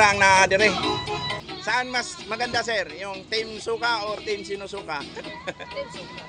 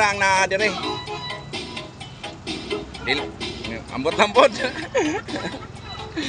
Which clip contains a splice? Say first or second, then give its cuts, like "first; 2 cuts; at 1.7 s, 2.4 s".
first; 1 cut; at 1.4 s